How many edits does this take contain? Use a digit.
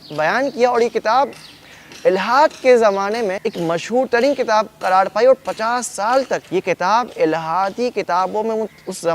2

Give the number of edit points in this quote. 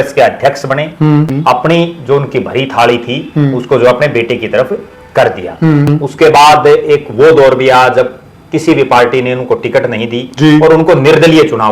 2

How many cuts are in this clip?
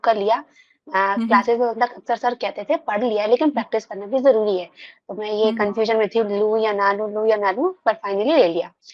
0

